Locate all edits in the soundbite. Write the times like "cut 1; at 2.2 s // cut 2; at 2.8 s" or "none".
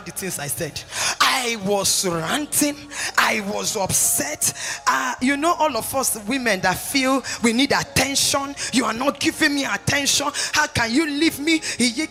none